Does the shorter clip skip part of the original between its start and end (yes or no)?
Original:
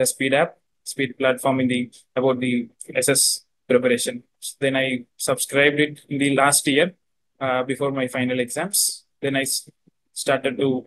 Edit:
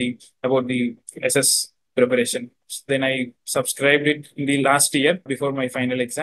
yes